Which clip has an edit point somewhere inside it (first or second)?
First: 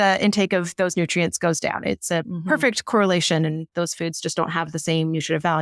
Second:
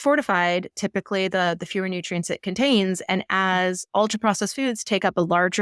first